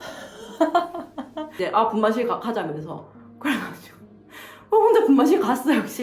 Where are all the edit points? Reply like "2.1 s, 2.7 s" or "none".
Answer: 1.6 s